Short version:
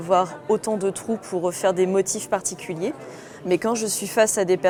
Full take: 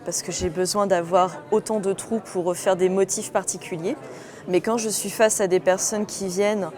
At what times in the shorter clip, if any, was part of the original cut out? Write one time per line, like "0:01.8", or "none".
none